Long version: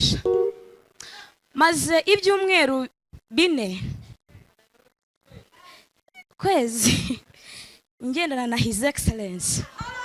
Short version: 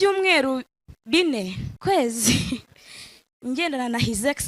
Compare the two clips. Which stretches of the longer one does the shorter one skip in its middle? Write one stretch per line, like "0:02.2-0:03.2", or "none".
0:03.9-0:06.2